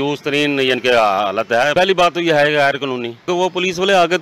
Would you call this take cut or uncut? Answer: cut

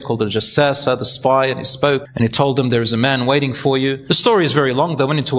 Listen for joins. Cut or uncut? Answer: cut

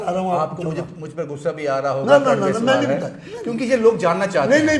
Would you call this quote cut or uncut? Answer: uncut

